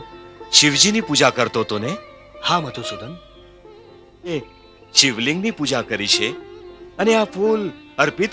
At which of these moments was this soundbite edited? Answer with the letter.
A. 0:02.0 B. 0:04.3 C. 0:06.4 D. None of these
B